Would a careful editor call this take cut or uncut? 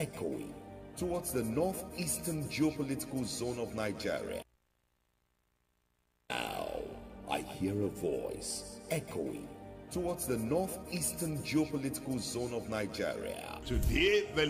uncut